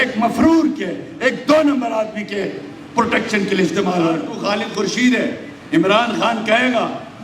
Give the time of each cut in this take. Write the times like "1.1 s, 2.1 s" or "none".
4.3 s